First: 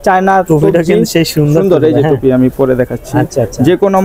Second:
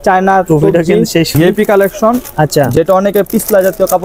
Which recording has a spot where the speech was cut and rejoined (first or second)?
second